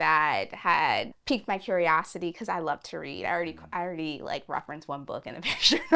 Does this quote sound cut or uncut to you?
cut